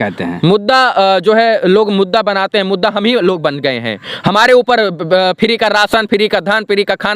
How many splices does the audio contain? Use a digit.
0